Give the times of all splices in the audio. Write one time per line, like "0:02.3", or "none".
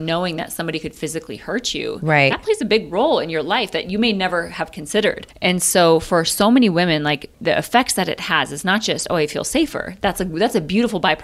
0:05.3
0:07.3

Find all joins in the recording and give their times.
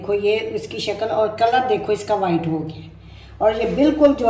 none

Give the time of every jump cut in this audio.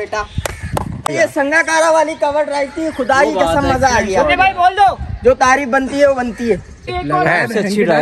0:01.1
0:06.9

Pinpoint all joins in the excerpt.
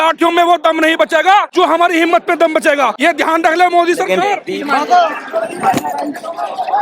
0:01.5
0:02.9
0:04.4

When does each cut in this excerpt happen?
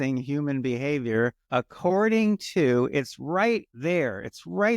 0:01.4
0:03.7

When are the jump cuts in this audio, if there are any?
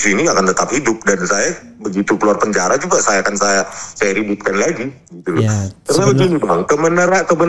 none

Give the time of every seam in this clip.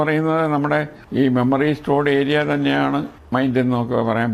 0:01.0
0:03.2

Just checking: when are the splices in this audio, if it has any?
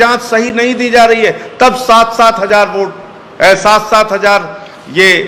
none

